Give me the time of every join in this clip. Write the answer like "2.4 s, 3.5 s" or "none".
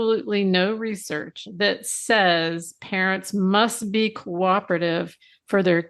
1.4 s